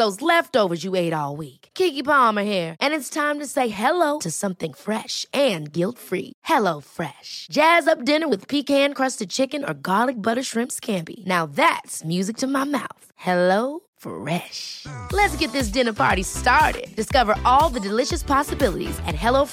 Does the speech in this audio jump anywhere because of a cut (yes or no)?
no